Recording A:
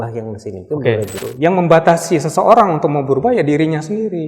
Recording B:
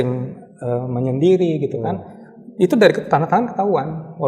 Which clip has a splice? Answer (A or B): A